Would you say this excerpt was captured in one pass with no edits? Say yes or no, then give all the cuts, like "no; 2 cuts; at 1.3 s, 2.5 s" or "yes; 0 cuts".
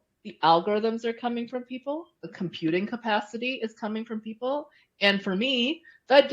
yes; 0 cuts